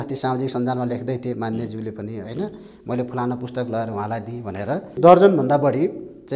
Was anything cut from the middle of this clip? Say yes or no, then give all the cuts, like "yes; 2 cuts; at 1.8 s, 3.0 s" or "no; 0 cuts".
yes; 1 cut; at 4.9 s